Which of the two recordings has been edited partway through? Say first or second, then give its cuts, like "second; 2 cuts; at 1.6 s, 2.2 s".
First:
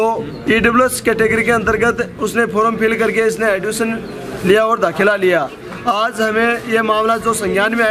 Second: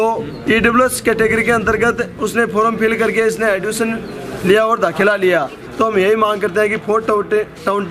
second; 1 cut; at 5.6 s